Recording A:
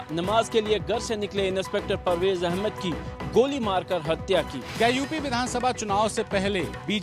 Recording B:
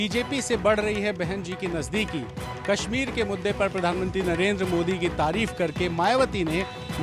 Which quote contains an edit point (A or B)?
A